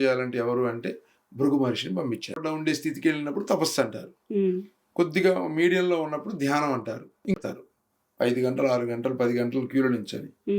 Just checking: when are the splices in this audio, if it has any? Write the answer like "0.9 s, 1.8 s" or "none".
2.3 s, 7.3 s